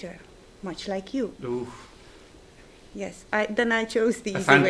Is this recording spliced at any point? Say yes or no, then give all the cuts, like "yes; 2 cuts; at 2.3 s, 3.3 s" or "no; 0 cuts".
no; 0 cuts